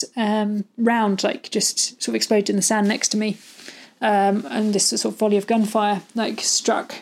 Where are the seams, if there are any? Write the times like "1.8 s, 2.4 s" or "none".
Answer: none